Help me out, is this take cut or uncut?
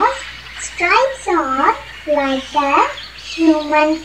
uncut